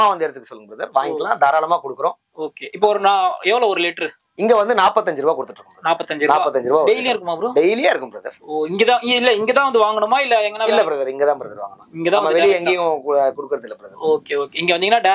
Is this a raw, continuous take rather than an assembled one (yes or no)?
yes